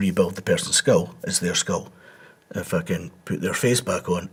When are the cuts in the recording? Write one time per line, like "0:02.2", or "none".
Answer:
none